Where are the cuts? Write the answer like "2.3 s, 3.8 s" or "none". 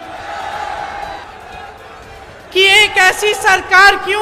1.2 s